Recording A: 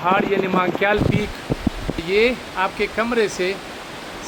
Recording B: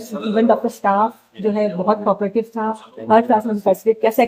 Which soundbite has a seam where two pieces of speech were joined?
A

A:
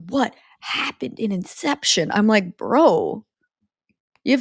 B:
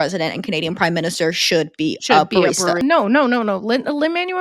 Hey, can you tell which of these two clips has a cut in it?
B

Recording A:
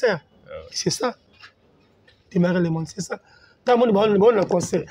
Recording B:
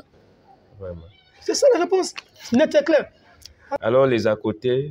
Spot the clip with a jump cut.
B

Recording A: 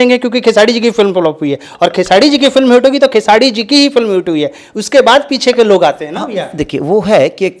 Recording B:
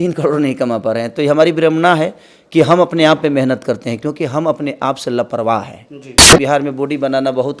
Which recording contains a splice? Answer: B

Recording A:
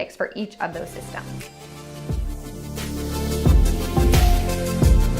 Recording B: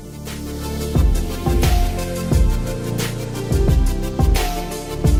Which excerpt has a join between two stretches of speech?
A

